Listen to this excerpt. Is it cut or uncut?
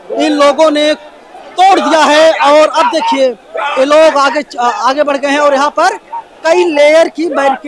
uncut